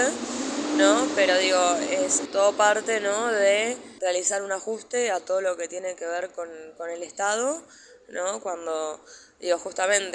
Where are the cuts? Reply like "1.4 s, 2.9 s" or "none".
2.2 s, 3.9 s